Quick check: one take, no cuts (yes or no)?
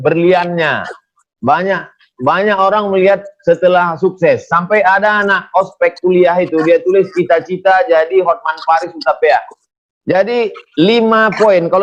yes